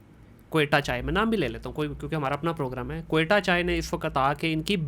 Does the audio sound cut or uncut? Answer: uncut